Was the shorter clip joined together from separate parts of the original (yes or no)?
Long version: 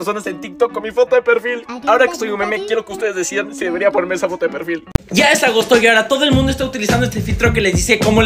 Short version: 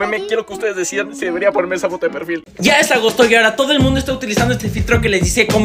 yes